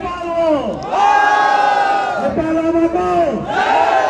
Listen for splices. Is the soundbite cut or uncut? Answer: cut